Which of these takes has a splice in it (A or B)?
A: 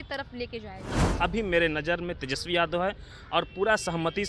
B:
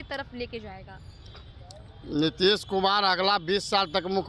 A